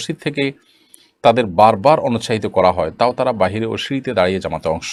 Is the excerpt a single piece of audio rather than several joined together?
yes; 0 cuts

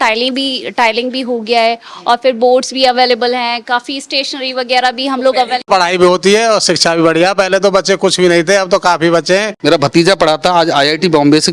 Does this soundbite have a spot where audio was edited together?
yes; 2 cuts; at 5.7 s, 9.5 s

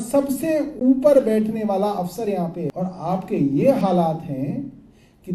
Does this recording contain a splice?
yes; 1 cut; at 2.7 s

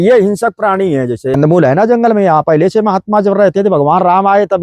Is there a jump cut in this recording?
yes; 1 cut; at 1.4 s

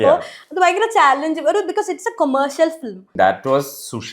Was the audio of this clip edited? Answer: yes; 1 cut; at 3.1 s

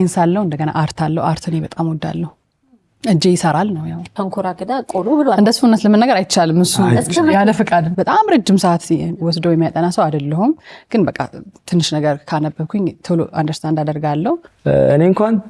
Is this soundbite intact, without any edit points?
no; 3 cuts; at 4.1 s, 7.9 s, 14.5 s

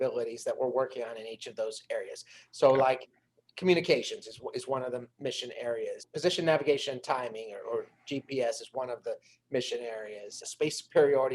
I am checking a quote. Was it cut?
yes; 2 cuts; at 6.1 s, 10.4 s

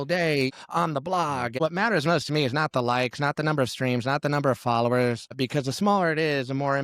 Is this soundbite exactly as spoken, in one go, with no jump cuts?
no; 1 cut; at 5.3 s

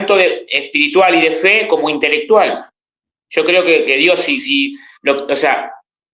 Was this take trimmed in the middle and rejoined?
no; 0 cuts

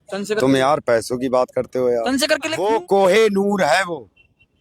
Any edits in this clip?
yes; 1 cut; at 2.6 s

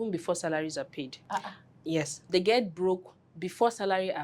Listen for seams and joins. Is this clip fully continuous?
no; 2 cuts; at 1.2 s, 2.3 s

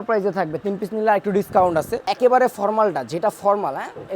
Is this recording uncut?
no; 1 cut; at 2.0 s

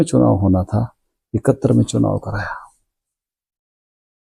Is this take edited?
no; 0 cuts

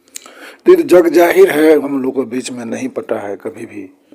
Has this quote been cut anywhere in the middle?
yes; 1 cut; at 1.9 s

